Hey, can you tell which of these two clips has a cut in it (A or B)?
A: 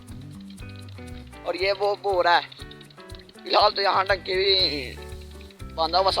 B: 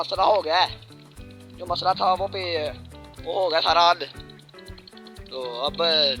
A